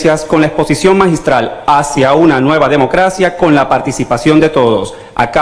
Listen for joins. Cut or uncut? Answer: cut